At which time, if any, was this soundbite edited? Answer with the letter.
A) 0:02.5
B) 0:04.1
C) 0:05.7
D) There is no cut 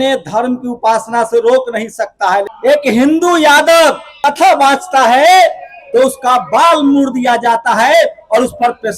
A